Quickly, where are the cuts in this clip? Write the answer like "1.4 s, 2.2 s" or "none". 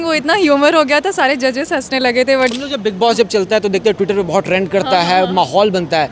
2.5 s